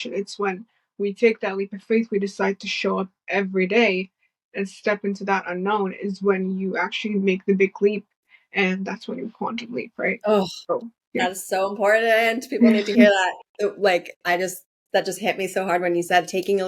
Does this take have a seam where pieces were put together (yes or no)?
no